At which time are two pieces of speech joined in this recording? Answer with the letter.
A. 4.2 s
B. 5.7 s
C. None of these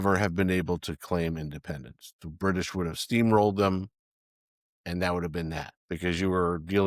B